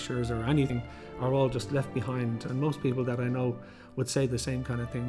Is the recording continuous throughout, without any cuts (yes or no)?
yes